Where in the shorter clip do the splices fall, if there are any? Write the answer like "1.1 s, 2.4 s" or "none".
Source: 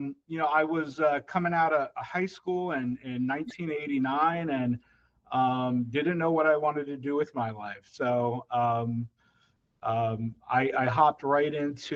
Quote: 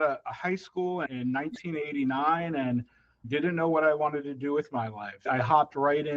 1.1 s, 3.3 s, 5.2 s